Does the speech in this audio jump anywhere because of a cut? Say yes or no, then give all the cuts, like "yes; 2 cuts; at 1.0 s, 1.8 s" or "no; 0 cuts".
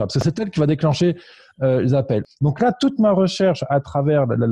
yes; 1 cut; at 2.2 s